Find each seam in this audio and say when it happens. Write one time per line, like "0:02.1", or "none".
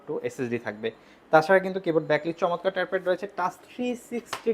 none